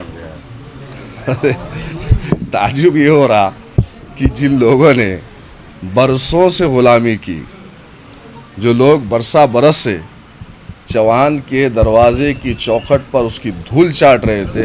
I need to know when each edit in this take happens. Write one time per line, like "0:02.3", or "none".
none